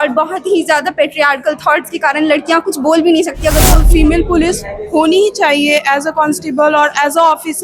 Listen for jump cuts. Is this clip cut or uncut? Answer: cut